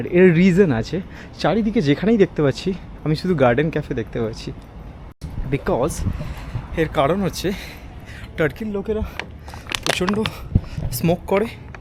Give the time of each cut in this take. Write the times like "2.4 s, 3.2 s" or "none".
none